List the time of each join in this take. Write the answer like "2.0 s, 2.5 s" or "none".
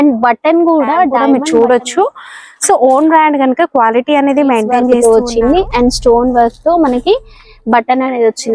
1.2 s, 5.0 s